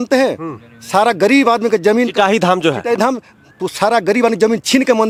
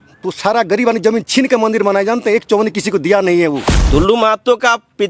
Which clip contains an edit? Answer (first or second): second